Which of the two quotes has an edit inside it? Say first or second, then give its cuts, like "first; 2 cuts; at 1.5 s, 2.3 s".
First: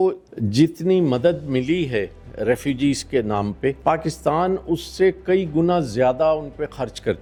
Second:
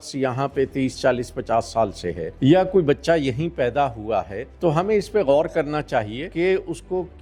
second; 3 cuts; at 2.3 s, 4.4 s, 6.3 s